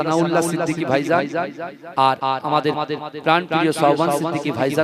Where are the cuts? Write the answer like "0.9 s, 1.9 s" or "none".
none